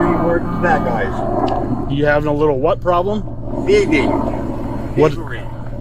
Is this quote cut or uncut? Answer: uncut